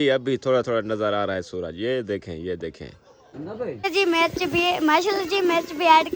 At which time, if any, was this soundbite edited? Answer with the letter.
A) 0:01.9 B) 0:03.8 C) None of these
B